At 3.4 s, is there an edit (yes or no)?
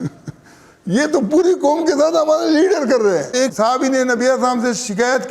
yes